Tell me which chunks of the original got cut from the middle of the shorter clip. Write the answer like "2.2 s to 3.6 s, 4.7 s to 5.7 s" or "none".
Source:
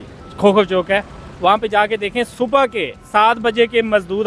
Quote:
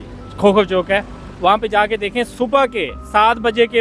none

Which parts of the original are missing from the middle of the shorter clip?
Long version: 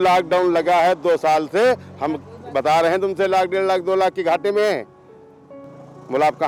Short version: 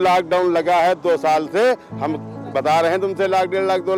none

